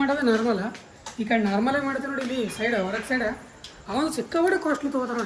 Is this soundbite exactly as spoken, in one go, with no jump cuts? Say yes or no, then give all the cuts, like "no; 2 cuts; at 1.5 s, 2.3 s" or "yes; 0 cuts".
yes; 0 cuts